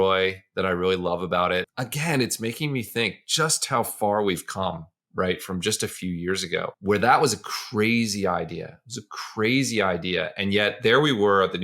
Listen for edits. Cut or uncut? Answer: cut